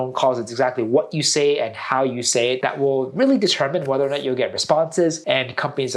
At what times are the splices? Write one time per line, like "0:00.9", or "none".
0:02.6
0:05.2